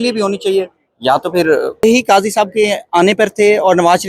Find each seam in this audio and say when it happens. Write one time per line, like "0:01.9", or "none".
0:01.8